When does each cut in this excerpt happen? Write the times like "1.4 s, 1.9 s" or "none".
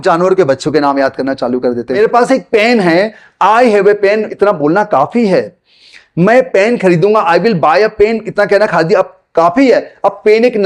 2.0 s